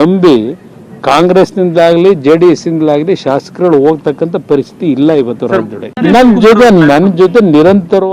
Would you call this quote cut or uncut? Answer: cut